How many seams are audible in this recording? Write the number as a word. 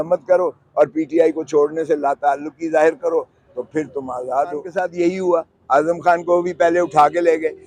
one